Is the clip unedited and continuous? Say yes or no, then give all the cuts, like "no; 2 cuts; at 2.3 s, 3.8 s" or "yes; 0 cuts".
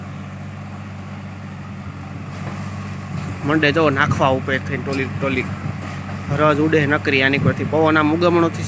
yes; 0 cuts